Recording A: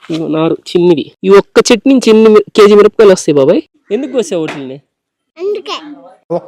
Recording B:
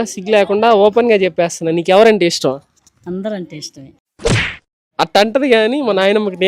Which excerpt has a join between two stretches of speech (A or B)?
A